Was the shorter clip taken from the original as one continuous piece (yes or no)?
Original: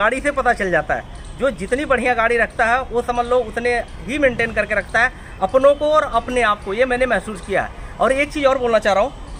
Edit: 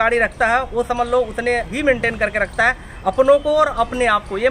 no